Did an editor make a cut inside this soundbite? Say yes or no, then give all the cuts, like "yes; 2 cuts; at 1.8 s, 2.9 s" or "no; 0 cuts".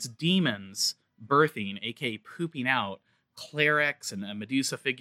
no; 0 cuts